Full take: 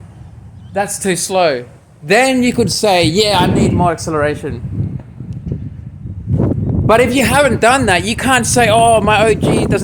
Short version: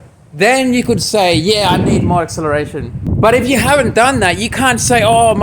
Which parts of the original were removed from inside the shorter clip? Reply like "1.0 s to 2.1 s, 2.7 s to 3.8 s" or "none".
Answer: 4.7 s to 6.7 s